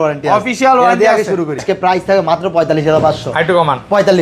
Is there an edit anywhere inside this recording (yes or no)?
yes